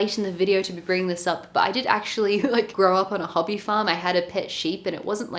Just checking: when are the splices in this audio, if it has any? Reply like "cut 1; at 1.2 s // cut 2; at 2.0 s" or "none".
none